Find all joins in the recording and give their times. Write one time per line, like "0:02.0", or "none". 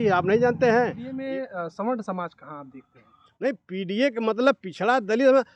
0:01.0